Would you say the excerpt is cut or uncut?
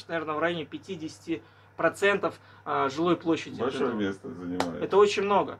uncut